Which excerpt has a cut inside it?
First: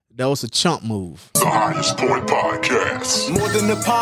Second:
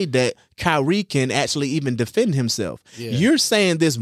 first; 1 cut; at 1.2 s

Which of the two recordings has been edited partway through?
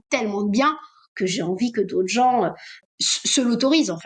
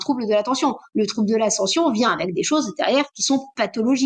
first; 1 cut; at 2.8 s

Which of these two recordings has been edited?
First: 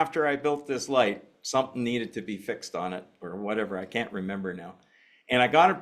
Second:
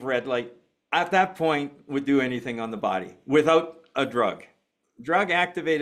first; 1 cut; at 1.3 s

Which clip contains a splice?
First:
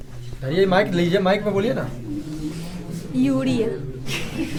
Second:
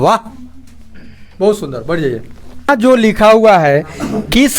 second; 1 cut; at 2.7 s

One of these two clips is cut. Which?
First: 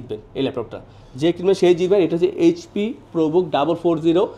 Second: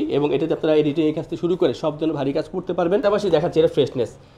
second; 1 cut; at 3.0 s

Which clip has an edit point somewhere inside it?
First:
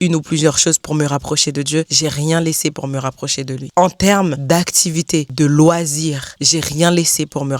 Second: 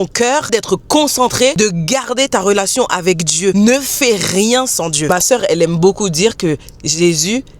second; 1 cut; at 5.1 s

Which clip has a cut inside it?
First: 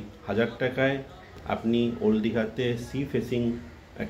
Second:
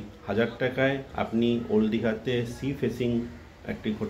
second; 1 cut; at 1.1 s

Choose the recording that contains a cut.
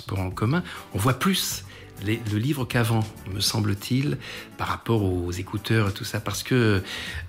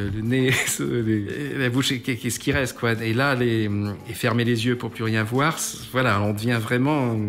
second; 2 cuts; at 1.3 s, 4.1 s

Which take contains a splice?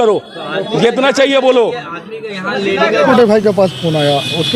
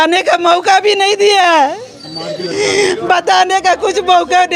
first; 1 cut; at 3.1 s

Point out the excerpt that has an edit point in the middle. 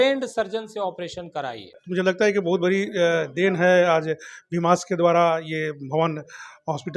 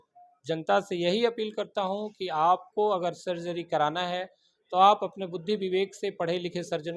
first; 1 cut; at 1.8 s

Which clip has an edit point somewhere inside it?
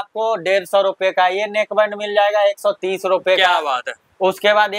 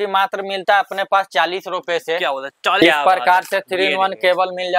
second; 1 cut; at 2.8 s

